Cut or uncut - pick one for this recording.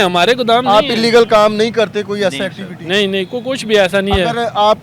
uncut